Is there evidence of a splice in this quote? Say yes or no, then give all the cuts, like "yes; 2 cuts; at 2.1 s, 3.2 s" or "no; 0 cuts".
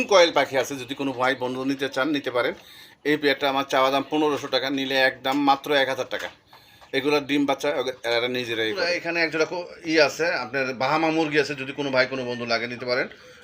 yes; 1 cut; at 8.9 s